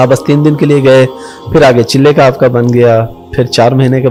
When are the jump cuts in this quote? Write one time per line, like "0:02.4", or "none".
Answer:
none